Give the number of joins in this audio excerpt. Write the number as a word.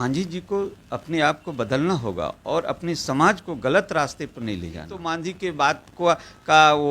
one